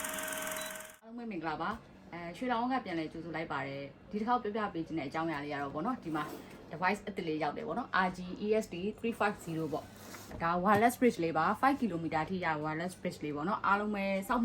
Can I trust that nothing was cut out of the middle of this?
no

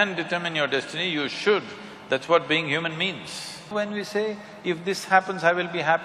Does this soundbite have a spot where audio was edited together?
yes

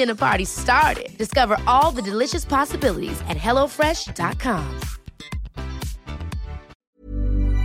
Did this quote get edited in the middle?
yes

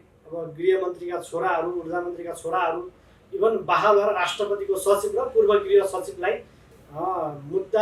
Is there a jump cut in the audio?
no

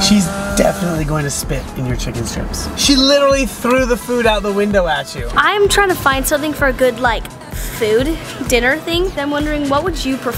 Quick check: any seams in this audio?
yes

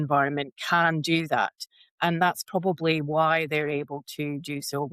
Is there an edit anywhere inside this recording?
no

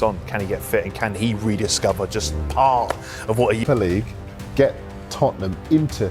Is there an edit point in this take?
yes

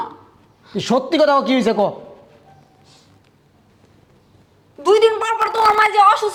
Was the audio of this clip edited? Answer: no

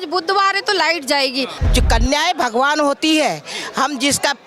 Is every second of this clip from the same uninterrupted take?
no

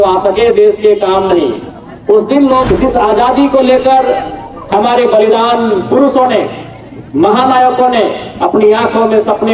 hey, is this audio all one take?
no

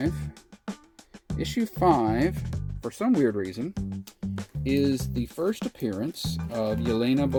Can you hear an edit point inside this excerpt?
no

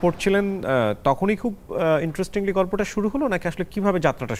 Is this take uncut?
yes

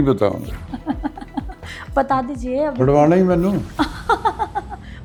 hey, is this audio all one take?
yes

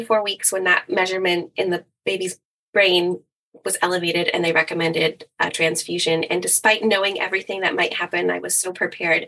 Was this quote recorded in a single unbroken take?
yes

